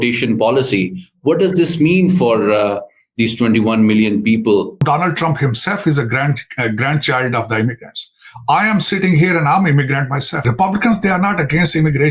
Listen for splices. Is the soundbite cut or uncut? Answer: cut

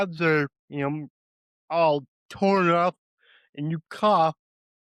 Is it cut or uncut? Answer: uncut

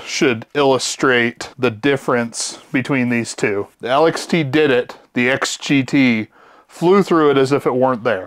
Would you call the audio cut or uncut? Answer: uncut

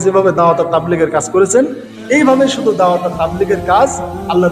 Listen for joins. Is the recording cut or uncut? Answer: uncut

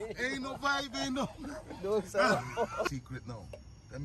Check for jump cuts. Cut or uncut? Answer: cut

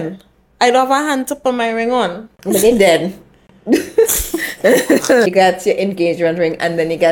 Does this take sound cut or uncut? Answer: cut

